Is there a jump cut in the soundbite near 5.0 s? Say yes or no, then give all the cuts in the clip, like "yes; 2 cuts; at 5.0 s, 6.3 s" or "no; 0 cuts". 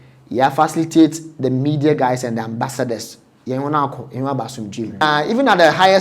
yes; 1 cut; at 5.0 s